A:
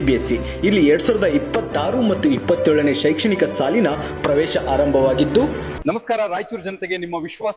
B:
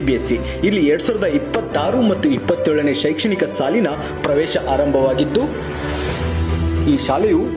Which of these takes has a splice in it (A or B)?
A